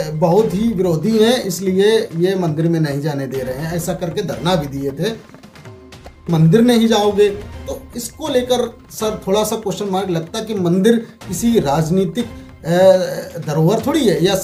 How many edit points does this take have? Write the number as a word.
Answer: one